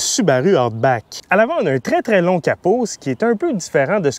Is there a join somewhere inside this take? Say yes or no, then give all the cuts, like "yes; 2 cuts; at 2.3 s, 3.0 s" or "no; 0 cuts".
no; 0 cuts